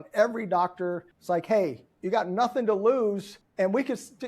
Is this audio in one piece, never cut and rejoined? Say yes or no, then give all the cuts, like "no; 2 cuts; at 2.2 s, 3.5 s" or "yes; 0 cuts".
no; 2 cuts; at 1.1 s, 3.4 s